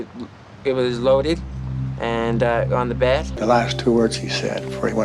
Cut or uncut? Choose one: cut